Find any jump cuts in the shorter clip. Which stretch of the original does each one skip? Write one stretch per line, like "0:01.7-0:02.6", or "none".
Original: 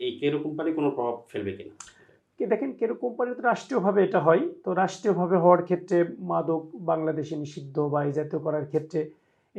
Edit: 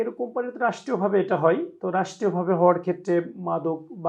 none